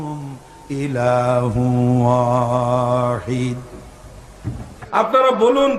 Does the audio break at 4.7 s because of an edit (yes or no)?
yes